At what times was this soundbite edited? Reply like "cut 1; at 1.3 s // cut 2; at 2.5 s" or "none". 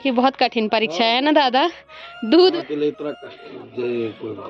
cut 1; at 2.5 s